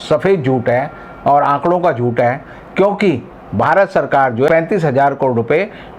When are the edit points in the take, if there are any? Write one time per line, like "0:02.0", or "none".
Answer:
0:04.5

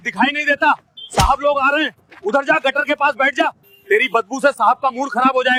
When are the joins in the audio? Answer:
none

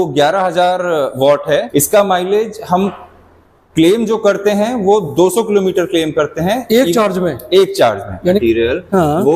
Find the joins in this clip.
0:01.7
0:08.2

